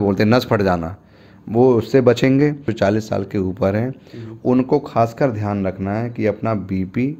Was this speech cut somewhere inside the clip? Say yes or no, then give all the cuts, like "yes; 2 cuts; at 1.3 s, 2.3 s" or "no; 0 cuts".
yes; 1 cut; at 2.7 s